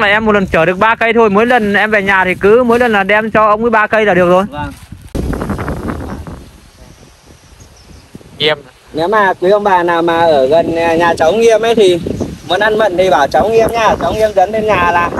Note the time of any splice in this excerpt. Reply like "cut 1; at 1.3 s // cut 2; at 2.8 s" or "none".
cut 1; at 5.1 s